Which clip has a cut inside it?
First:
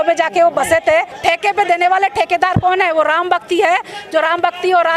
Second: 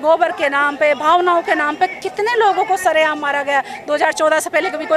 first; 1 cut; at 1.1 s

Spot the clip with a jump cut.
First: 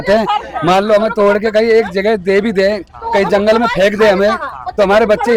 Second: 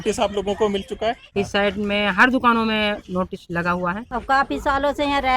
second; 2 cuts; at 1.2 s, 4.1 s

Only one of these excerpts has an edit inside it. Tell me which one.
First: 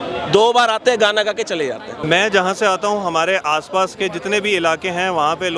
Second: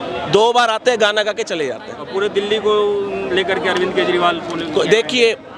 first; 1 cut; at 1.9 s

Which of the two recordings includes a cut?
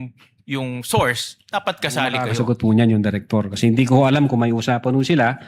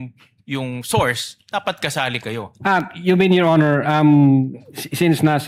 first; 1 cut; at 2.2 s

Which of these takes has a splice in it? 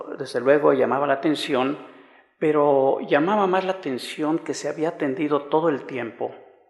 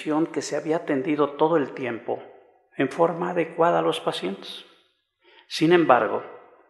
second; 1 cut; at 3.7 s

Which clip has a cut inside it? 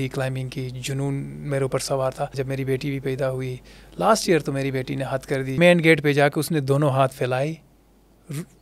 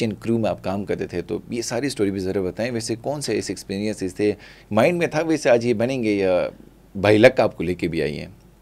first; 2 cuts; at 2.4 s, 5.6 s

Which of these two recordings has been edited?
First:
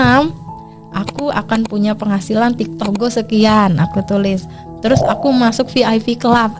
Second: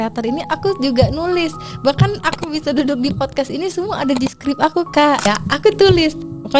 second; 1 cut; at 5.3 s

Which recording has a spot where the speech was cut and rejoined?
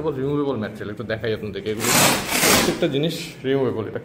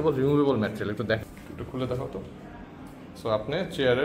second; 1 cut; at 1.2 s

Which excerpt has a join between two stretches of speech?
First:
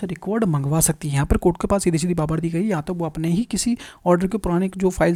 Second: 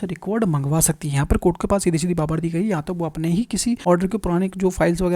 second; 1 cut; at 3.8 s

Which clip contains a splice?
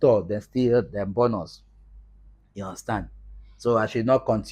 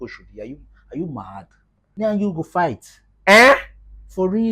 second; 1 cut; at 1.9 s

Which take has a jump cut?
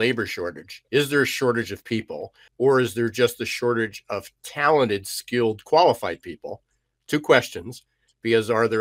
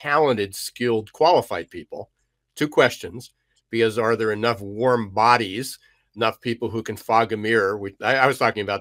first; 1 cut; at 2.4 s

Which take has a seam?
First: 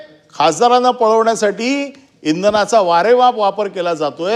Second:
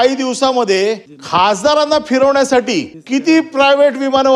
second; 2 cuts; at 1.1 s, 2.9 s

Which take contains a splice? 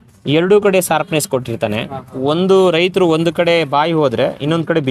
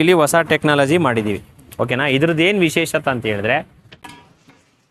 second; 1 cut; at 4.0 s

